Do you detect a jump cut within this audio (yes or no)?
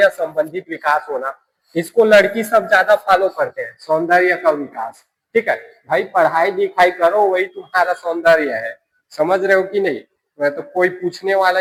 no